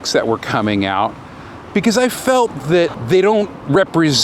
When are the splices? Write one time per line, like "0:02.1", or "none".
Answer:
0:03.0